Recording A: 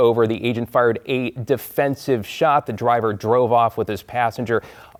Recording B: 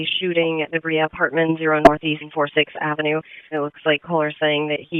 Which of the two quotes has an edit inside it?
B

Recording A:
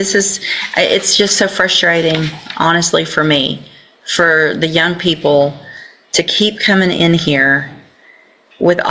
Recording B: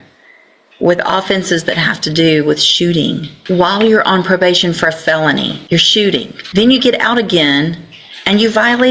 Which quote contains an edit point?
B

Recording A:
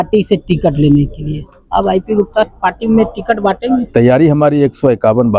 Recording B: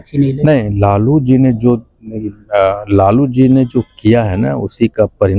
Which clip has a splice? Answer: A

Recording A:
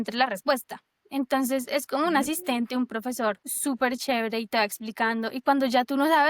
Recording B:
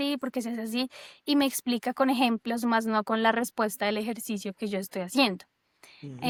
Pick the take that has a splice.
A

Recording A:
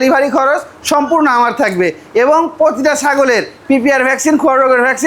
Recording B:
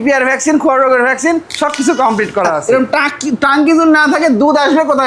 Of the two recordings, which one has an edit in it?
B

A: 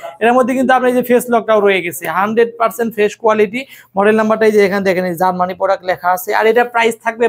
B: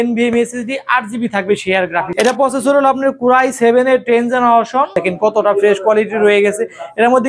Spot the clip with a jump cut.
B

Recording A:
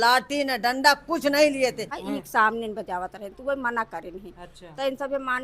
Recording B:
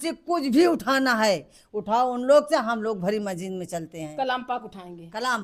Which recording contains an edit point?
A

